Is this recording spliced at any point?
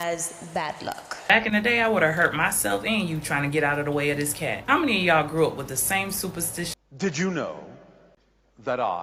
yes; 2 cuts; at 1.2 s, 6.7 s

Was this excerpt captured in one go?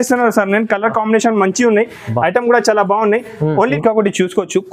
no; 1 cut; at 3.7 s

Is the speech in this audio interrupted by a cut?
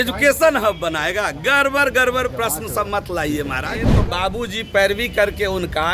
yes; 1 cut; at 3.9 s

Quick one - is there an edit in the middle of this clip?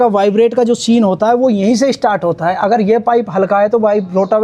no; 0 cuts

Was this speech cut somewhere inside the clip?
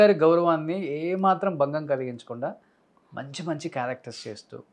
no; 0 cuts

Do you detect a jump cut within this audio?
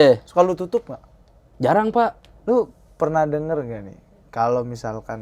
yes; 1 cut; at 2.3 s

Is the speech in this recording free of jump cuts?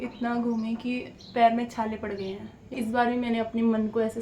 no; 1 cut; at 2.7 s

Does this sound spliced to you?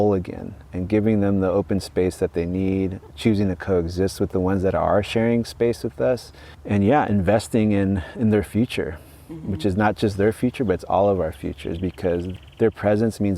yes; 1 cut; at 12.3 s

